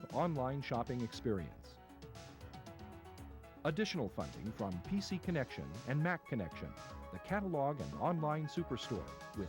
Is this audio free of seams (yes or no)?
no